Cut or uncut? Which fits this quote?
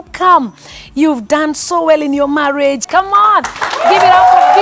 cut